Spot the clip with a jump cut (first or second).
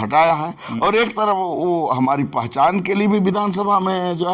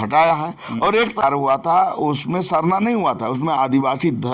second